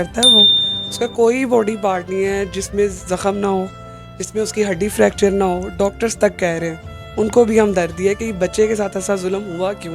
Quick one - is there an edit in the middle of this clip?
no; 0 cuts

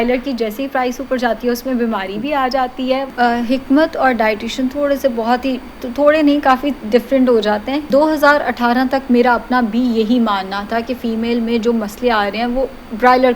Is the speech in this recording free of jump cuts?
no; 2 cuts; at 3.1 s, 7.8 s

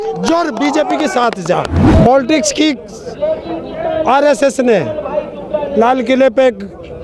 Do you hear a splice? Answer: yes; 1 cut; at 1.8 s

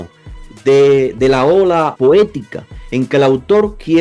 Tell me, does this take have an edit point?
yes; 1 cut; at 1.9 s

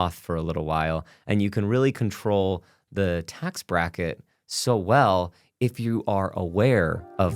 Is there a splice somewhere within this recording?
no; 0 cuts

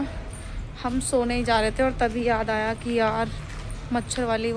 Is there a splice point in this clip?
no; 0 cuts

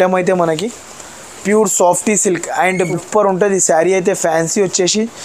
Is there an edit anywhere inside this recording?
yes; 1 cut; at 2.8 s

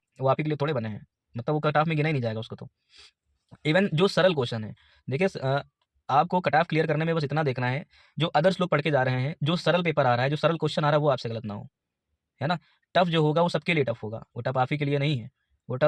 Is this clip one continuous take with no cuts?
yes; 0 cuts

